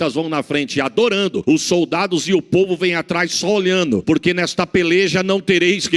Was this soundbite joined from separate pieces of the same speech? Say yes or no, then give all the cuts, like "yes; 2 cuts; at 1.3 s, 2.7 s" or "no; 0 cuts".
yes; 2 cuts; at 1.4 s, 4.0 s